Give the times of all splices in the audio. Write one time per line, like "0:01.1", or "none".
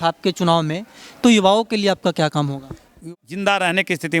0:02.9